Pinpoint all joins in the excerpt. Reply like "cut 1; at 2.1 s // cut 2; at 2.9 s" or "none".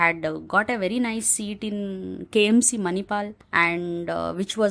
cut 1; at 3.4 s

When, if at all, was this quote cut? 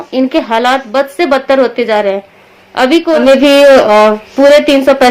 cut 1; at 3.0 s

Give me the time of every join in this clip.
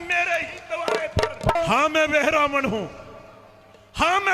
cut 1; at 1.6 s

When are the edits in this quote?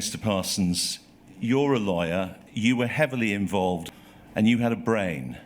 cut 1; at 3.8 s

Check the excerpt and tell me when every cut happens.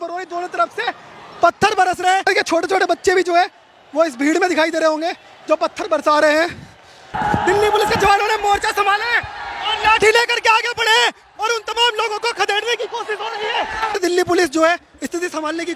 cut 1; at 2.3 s // cut 2; at 7.1 s // cut 3; at 14.0 s

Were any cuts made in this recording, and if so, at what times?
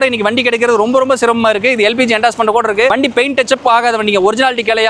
none

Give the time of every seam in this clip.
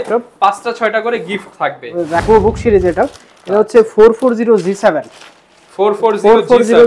cut 1; at 2.2 s

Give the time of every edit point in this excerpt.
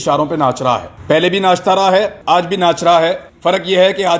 cut 1; at 0.9 s // cut 2; at 2.2 s // cut 3; at 3.3 s

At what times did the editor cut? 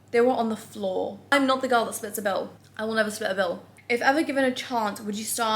cut 1; at 1.2 s // cut 2; at 3.7 s

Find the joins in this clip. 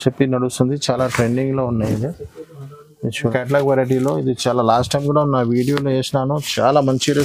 cut 1; at 3.2 s

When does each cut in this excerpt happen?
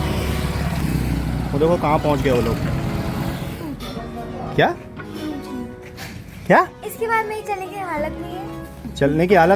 cut 1; at 3.6 s

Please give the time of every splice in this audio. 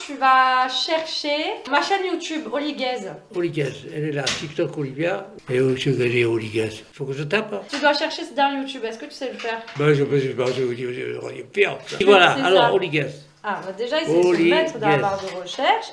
none

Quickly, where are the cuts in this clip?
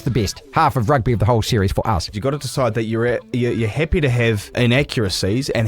cut 1; at 2.1 s // cut 2; at 4.6 s

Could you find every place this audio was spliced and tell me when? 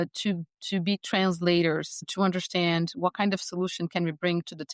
cut 1; at 2.0 s

